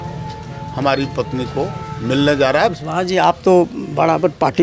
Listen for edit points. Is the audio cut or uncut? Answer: cut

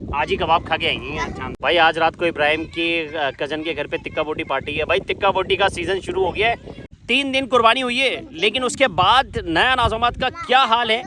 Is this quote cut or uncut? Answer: cut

